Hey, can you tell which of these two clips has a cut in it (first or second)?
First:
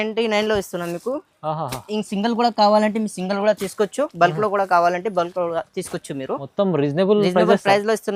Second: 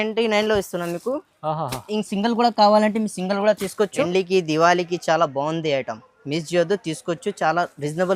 second